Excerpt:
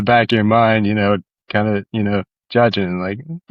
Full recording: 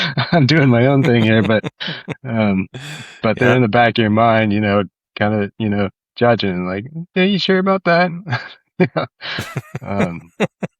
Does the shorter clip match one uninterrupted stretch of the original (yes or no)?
yes